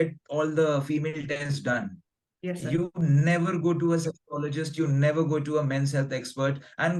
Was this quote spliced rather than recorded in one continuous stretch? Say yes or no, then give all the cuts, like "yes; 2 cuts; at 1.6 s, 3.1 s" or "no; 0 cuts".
no; 0 cuts